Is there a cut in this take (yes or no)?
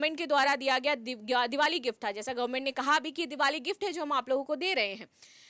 no